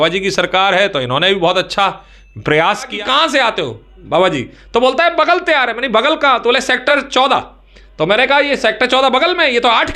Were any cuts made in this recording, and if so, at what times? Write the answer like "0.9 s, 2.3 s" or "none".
2.9 s, 6.9 s